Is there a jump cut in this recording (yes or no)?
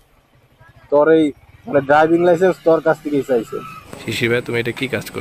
yes